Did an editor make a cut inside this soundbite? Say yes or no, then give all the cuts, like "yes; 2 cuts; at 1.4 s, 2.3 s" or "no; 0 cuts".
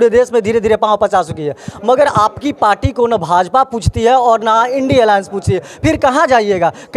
no; 0 cuts